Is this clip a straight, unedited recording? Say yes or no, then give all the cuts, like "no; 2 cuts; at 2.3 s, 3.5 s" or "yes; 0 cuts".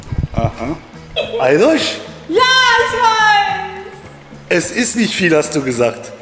no; 1 cut; at 1.2 s